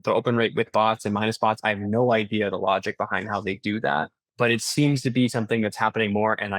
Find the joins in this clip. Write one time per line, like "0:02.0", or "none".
0:04.3